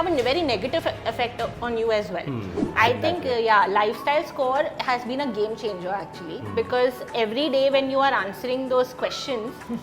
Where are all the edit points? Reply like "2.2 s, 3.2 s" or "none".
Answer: 2.6 s